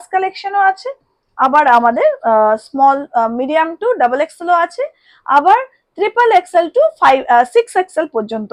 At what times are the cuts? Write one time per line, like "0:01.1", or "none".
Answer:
none